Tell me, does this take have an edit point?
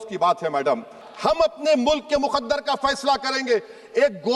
yes; 1 cut; at 1.0 s

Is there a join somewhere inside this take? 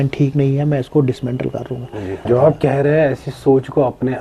no; 0 cuts

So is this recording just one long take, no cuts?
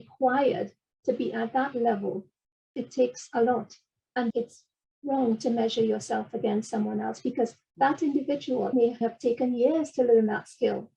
no; 4 cuts; at 2.7 s, 4.2 s, 7.6 s, 9.0 s

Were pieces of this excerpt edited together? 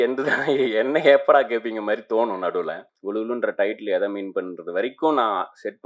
yes; 1 cut; at 2.9 s

